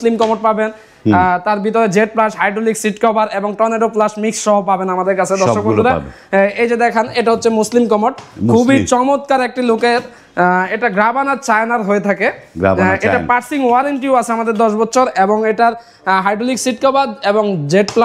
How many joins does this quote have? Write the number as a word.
zero